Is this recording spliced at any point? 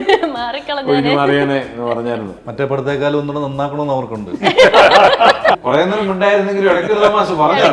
yes; 2 cuts; at 2.4 s, 5.6 s

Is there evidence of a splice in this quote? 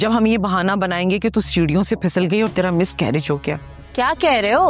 yes; 1 cut; at 3.7 s

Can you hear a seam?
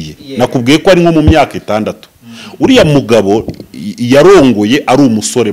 no; 0 cuts

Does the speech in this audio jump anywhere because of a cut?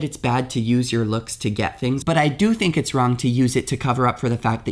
yes; 1 cut; at 2.0 s

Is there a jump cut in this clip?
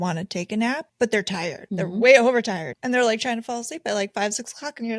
yes; 3 cuts; at 0.9 s, 1.6 s, 2.7 s

